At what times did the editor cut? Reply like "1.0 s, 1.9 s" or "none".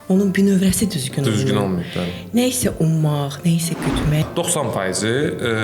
4.2 s